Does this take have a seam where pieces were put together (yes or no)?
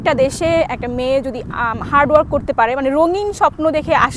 no